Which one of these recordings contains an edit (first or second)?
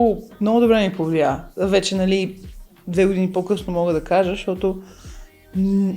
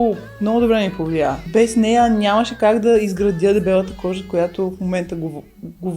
second